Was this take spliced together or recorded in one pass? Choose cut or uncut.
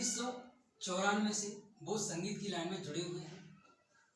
uncut